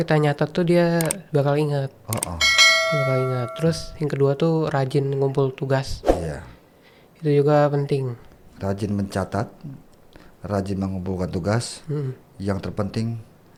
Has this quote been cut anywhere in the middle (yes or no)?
no